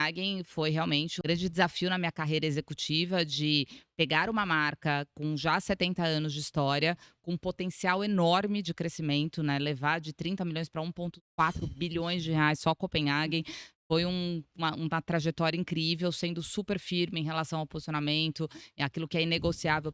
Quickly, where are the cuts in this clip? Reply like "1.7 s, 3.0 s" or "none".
1.1 s